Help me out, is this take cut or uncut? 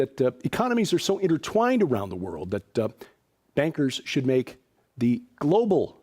cut